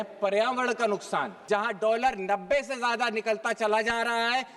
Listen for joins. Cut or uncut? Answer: cut